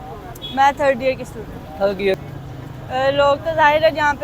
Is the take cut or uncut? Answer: cut